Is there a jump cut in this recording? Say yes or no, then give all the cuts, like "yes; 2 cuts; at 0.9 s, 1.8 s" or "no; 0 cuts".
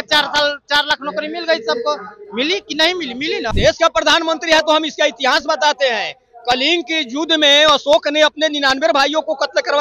yes; 1 cut; at 3.5 s